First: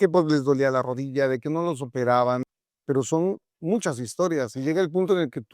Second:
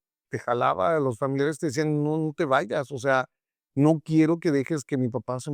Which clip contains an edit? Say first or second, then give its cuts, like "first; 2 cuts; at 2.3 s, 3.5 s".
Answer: first; 1 cut; at 2.4 s